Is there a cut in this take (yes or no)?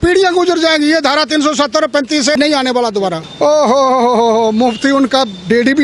yes